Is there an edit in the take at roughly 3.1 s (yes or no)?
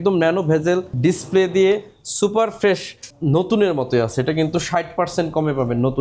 yes